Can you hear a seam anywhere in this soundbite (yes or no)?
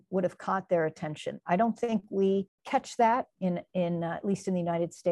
yes